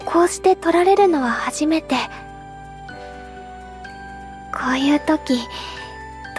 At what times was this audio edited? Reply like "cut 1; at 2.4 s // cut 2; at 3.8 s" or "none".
none